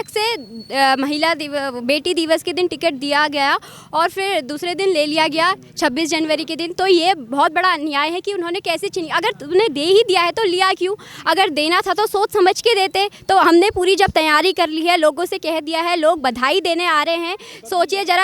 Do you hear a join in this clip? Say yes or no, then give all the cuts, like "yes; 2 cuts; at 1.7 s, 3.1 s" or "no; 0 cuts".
no; 0 cuts